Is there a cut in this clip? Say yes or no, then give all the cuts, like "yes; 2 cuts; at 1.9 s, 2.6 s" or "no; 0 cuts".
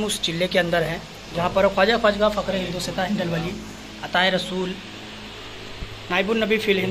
no; 0 cuts